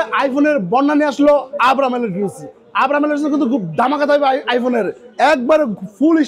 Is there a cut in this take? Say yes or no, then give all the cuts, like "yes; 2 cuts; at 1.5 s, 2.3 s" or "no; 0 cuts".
no; 0 cuts